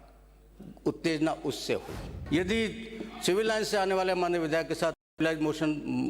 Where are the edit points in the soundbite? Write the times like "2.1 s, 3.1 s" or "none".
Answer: 2.1 s